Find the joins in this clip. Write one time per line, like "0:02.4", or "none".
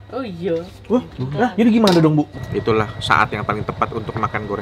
0:02.3